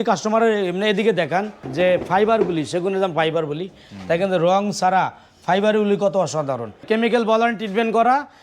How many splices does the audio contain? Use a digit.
2